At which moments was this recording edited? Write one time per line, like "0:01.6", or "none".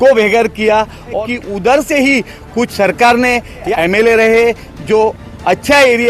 0:01.2
0:03.7
0:04.7